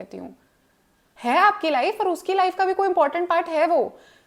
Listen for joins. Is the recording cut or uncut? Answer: uncut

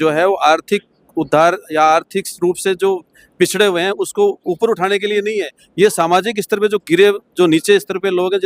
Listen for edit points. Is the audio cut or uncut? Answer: uncut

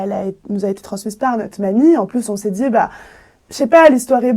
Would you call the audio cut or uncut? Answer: uncut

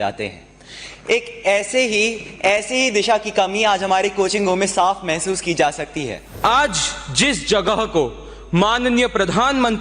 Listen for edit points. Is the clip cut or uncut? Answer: cut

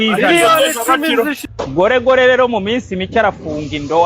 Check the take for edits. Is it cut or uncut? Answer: cut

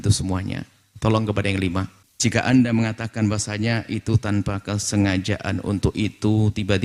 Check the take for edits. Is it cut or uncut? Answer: cut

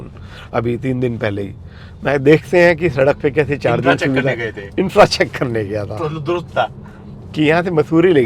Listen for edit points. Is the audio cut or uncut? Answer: uncut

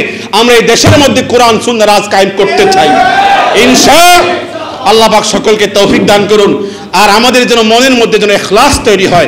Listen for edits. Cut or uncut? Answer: uncut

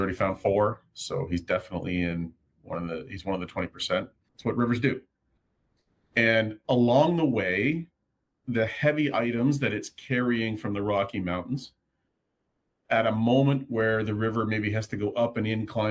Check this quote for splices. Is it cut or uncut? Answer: cut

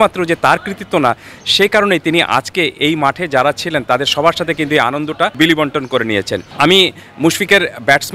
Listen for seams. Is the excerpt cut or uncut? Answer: cut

